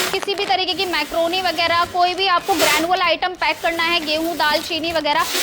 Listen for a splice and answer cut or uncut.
uncut